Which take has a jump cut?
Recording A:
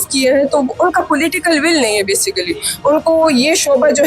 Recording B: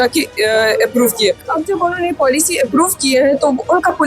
B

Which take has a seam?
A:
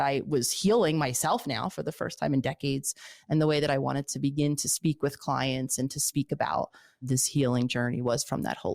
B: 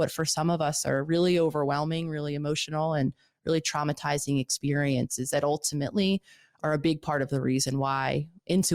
A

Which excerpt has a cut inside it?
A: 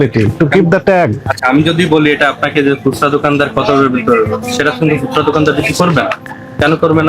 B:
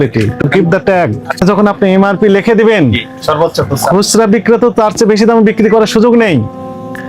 B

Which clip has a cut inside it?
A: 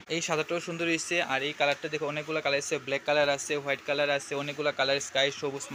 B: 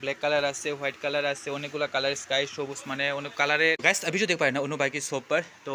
B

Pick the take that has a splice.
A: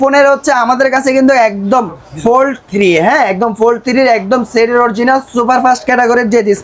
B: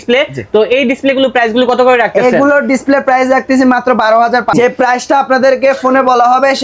B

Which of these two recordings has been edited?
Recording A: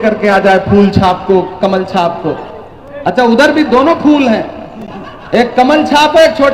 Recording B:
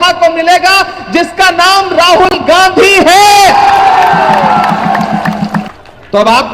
B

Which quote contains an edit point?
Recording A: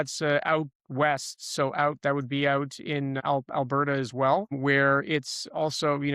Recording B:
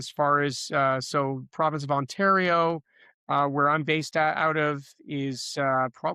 A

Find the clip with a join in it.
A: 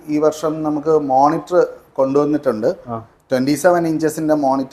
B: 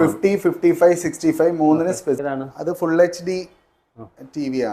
B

